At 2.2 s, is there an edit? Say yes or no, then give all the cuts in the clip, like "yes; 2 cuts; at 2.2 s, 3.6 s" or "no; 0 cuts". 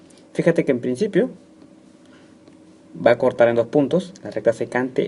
no; 1 cut; at 3.7 s